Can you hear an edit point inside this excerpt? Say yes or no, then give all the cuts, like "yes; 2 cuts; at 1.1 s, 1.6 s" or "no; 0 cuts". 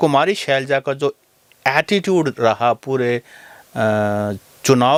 no; 0 cuts